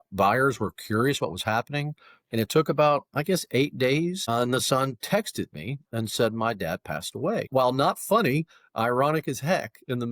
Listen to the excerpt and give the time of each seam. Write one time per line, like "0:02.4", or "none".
0:04.3
0:07.5